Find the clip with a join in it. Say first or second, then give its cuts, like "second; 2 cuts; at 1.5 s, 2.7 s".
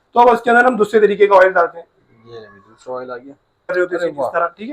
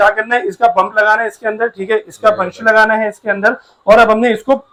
first; 1 cut; at 3.7 s